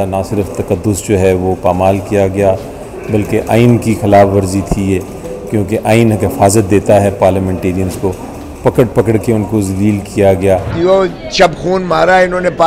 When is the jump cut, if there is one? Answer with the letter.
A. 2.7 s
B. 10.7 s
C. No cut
B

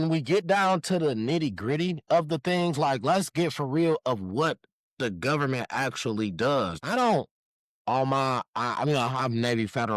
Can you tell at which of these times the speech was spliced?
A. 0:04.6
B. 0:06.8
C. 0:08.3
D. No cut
B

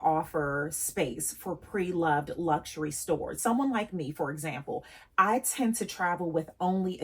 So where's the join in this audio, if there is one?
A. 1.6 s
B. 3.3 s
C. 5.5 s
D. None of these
B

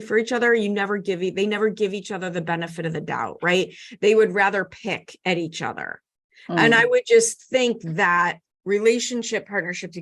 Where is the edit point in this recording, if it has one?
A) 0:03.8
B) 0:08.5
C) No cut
B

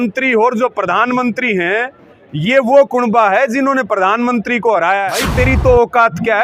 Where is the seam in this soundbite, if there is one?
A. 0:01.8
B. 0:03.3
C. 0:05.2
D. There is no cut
C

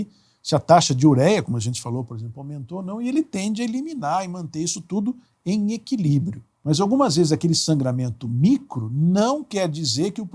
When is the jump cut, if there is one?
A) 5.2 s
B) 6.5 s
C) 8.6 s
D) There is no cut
B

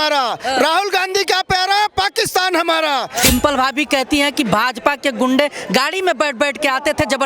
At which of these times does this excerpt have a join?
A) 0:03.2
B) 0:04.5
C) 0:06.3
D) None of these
A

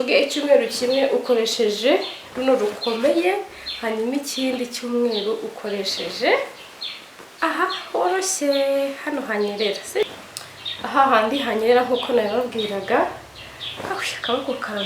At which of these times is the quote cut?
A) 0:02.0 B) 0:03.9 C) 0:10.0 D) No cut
C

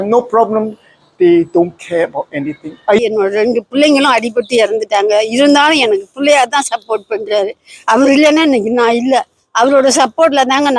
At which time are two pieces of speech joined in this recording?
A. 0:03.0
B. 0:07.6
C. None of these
A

